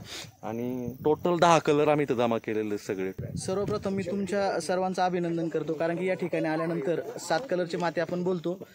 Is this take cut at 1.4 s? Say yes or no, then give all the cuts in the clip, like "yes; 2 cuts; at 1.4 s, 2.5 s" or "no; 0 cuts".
no; 1 cut; at 3.2 s